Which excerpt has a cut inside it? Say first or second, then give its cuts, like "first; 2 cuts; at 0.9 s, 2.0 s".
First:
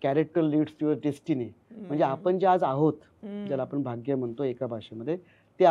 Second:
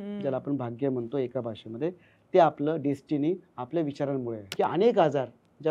second; 1 cut; at 4.4 s